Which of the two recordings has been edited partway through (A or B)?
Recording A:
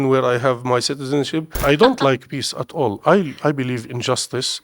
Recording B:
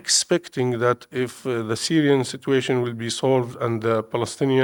A